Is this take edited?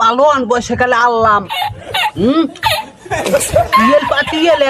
no; 0 cuts

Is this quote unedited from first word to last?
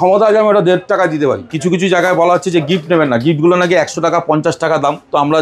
no; 1 cut; at 1.5 s

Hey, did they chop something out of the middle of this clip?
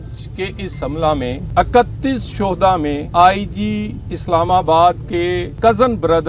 yes; 3 cuts; at 1.4 s, 3.0 s, 5.5 s

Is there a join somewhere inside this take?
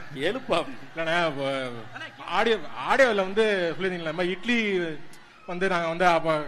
no; 0 cuts

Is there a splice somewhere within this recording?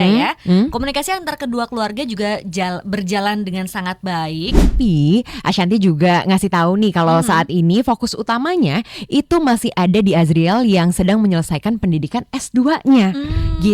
yes; 1 cut; at 4.7 s

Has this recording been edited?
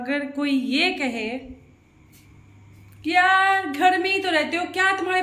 no; 0 cuts

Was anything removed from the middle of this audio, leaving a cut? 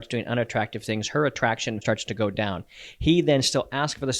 yes; 1 cut; at 1.8 s

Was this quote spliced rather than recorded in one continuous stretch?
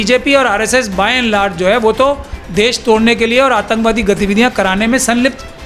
no; 0 cuts

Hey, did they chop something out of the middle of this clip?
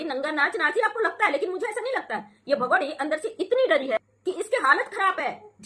no; 0 cuts

